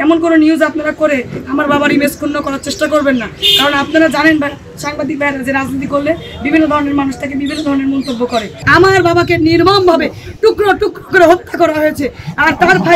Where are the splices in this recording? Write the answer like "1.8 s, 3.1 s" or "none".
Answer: 8.6 s